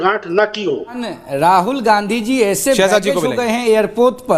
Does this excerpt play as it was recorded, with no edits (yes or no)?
no